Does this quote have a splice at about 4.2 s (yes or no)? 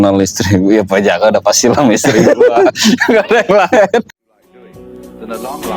yes